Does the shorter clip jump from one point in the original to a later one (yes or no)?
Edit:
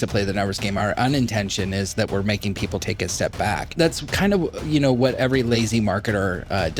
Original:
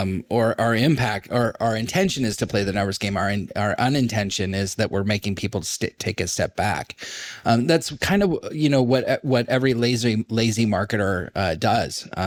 yes